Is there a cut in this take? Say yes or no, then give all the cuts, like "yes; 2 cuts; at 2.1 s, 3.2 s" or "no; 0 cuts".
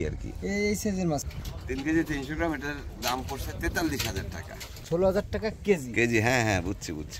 yes; 2 cuts; at 1.3 s, 4.8 s